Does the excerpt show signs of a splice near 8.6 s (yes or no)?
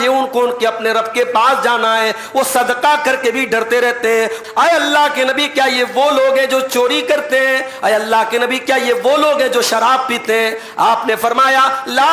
no